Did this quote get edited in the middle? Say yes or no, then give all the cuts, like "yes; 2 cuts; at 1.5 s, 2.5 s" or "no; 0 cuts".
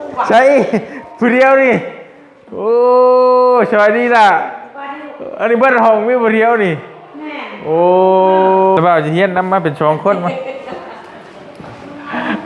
yes; 1 cut; at 8.8 s